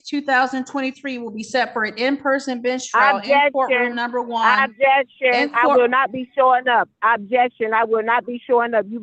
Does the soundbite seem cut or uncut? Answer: uncut